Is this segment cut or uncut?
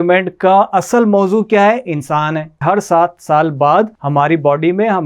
cut